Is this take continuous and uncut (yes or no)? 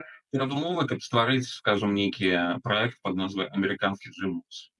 yes